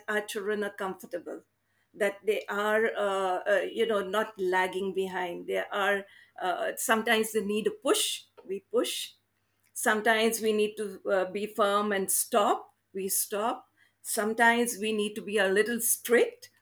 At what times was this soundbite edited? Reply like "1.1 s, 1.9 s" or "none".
none

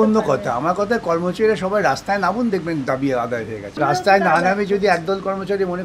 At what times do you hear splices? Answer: 3.7 s

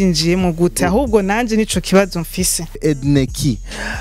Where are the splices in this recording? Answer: 2.8 s

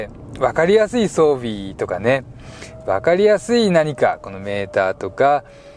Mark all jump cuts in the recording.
none

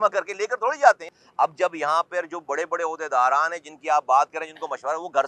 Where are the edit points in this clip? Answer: 1.1 s

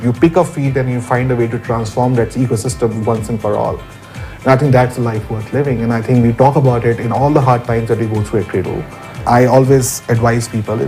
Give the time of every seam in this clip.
9.2 s

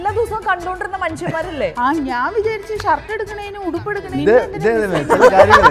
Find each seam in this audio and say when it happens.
4.1 s

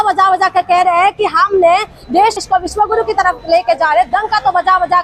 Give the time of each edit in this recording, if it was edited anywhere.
none

